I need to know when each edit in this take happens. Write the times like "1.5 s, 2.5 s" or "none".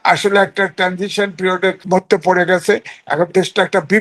1.8 s